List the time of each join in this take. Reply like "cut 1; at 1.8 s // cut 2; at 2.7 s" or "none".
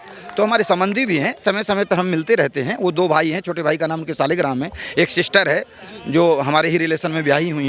cut 1; at 1.4 s